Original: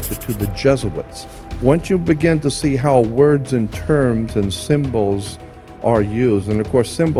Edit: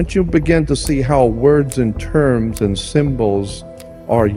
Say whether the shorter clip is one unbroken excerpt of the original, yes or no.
yes